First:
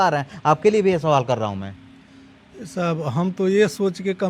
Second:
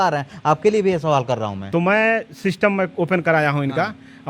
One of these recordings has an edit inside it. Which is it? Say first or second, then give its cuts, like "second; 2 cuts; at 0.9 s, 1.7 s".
second; 1 cut; at 1.6 s